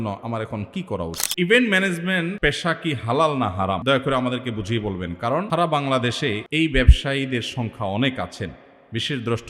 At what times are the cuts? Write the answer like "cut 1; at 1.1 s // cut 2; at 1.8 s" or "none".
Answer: cut 1; at 1.2 s // cut 2; at 2.4 s // cut 3; at 3.8 s // cut 4; at 5.5 s // cut 5; at 6.4 s